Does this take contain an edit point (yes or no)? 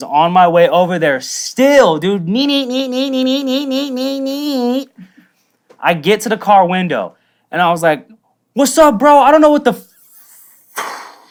no